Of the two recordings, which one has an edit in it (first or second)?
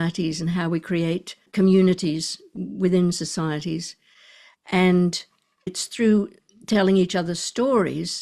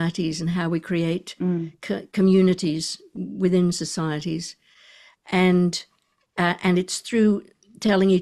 first